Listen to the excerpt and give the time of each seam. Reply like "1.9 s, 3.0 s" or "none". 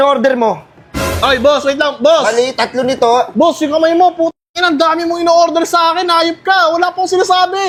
none